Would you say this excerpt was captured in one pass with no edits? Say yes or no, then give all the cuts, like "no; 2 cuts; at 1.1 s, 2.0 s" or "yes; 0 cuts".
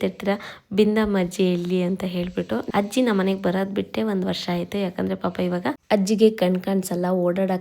no; 2 cuts; at 2.6 s, 5.8 s